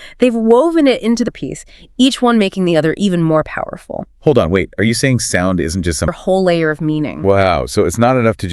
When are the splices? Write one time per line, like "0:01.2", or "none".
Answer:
0:01.3
0:06.1